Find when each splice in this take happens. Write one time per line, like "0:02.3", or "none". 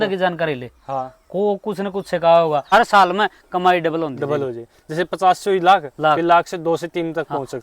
0:02.7